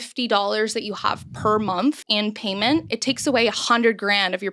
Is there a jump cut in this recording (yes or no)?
yes